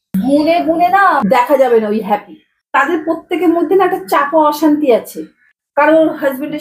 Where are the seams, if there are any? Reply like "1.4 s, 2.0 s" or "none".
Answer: none